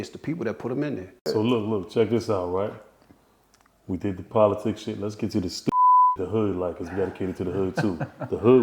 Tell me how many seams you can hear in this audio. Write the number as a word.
one